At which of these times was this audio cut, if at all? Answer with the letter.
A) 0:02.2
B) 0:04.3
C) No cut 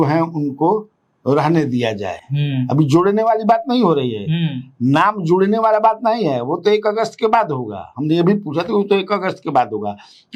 C